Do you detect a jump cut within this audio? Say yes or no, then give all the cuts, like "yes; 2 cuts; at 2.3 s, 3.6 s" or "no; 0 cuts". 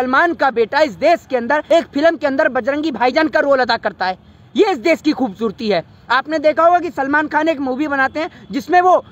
yes; 1 cut; at 1.6 s